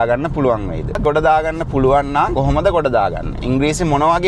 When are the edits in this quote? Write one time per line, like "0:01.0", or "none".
0:01.0
0:02.3
0:03.4